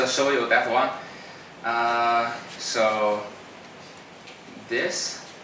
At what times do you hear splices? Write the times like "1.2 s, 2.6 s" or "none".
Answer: 4.4 s